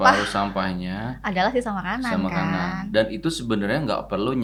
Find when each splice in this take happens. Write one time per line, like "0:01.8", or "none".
none